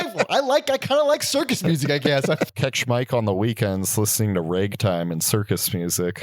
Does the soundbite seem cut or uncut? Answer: cut